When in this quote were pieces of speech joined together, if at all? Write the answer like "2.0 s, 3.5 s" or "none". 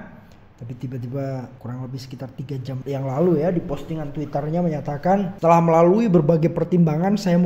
1.6 s, 2.8 s, 5.3 s